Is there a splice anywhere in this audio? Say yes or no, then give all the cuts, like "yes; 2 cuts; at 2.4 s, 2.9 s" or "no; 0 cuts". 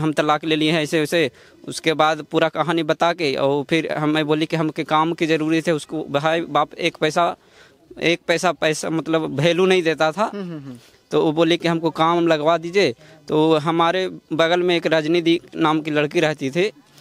no; 0 cuts